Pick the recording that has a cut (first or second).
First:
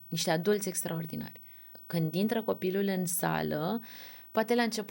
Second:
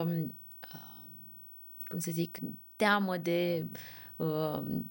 first